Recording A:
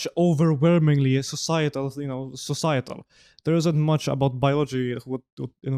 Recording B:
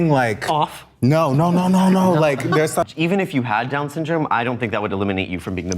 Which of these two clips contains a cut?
B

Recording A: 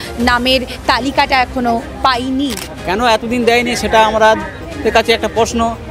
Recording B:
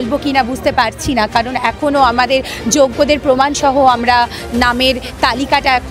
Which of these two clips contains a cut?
A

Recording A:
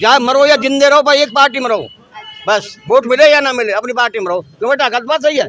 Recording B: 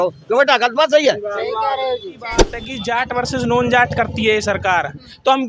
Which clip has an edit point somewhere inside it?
B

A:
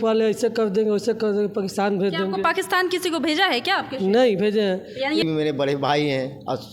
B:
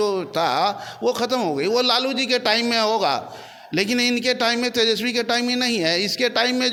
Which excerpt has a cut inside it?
A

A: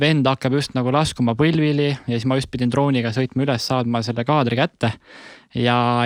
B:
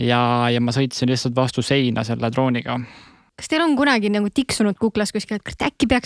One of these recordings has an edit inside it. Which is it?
B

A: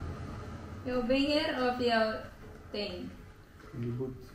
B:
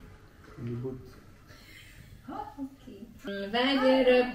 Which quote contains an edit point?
B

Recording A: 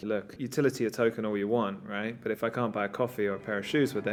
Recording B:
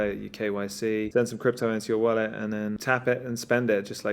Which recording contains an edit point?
B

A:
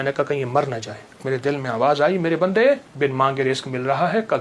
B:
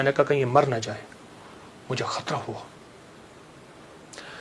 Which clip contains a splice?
A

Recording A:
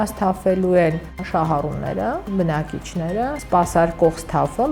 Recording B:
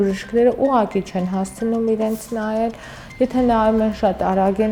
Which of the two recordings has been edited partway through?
A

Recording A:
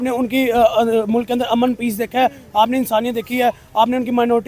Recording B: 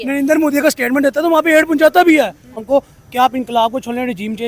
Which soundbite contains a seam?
B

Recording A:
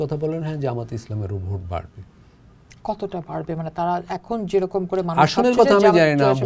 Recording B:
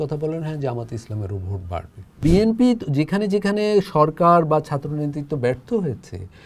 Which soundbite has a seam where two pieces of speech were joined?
B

